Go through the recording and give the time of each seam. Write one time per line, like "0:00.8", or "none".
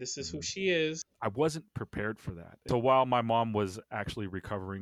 0:01.1
0:02.6